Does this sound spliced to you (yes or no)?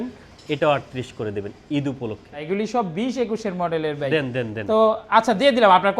yes